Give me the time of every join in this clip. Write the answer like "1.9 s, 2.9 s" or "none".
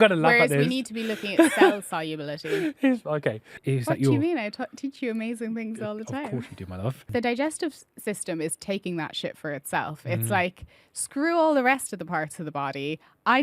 3.6 s, 7.1 s